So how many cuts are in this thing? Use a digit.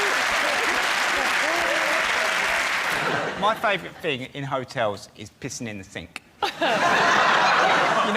1